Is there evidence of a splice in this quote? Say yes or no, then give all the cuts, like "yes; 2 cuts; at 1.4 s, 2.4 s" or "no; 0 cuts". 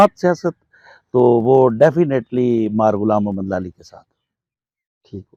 no; 0 cuts